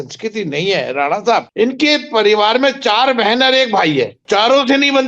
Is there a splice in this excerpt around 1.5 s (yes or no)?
yes